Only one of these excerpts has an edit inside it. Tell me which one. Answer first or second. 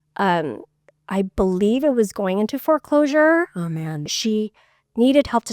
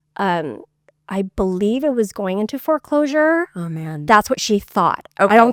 first